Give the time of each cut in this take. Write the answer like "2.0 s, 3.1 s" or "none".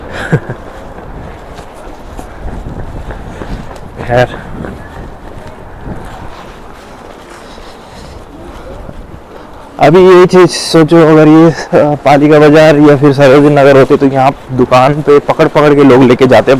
none